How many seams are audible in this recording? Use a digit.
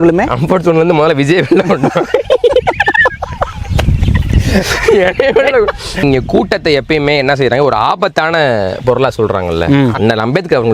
1